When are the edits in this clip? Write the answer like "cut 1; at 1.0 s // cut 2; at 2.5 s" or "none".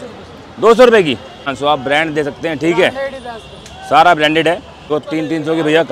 cut 1; at 1.5 s // cut 2; at 4.9 s